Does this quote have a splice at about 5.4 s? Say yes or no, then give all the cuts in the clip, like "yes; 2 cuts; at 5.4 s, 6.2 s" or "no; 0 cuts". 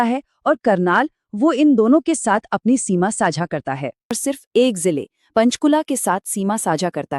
no; 1 cut; at 4.2 s